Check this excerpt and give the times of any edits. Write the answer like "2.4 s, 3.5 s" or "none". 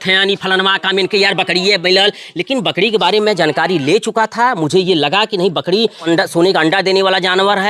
6.0 s